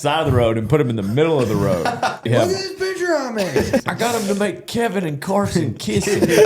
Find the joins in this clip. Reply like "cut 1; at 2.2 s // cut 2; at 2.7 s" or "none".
cut 1; at 2.2 s // cut 2; at 3.8 s

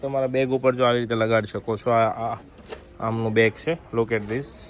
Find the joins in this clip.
none

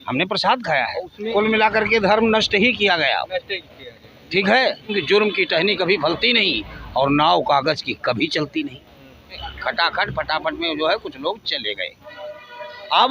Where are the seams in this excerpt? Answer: cut 1; at 1.2 s // cut 2; at 4.9 s // cut 3; at 9.5 s

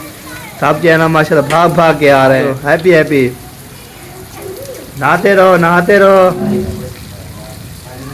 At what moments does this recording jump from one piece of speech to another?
cut 1; at 2.5 s // cut 2; at 6.4 s

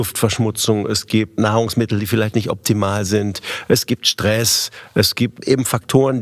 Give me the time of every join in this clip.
cut 1; at 1.4 s // cut 2; at 5.4 s

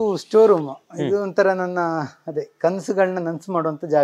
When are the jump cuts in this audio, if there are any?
none

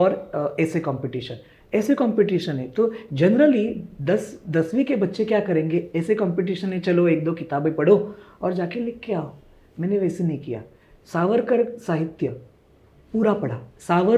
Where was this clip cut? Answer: none

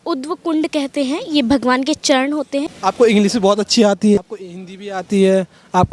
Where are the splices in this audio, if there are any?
cut 1; at 2.7 s // cut 2; at 4.2 s

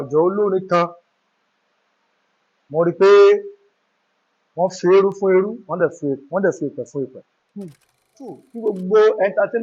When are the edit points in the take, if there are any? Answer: cut 1; at 8.5 s

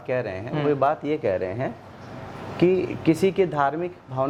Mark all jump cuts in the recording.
none

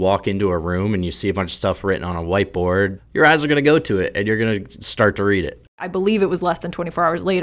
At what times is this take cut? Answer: cut 1; at 3.0 s // cut 2; at 5.9 s

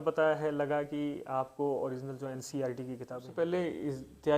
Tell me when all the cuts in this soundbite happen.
cut 1; at 3.3 s

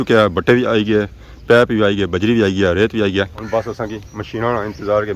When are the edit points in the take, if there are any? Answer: none

